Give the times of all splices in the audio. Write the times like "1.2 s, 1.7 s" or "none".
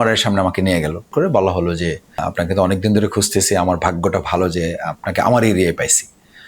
1.1 s, 2.2 s

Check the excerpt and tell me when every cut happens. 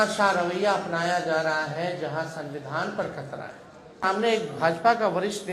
4.0 s

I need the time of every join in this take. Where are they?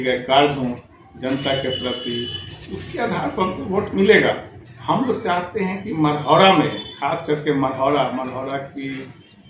none

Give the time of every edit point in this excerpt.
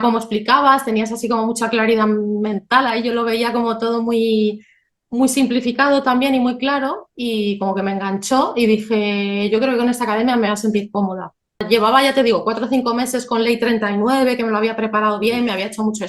11.6 s

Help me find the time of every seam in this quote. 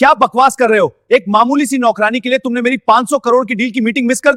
none

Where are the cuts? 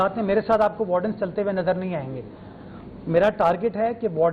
none

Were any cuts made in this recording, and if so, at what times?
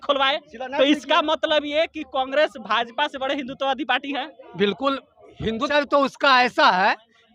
5.7 s

